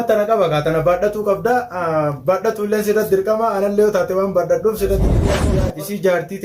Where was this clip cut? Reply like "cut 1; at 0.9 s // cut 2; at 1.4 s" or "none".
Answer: cut 1; at 5.3 s